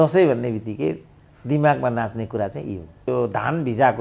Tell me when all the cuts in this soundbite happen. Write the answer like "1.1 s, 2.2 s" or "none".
3.1 s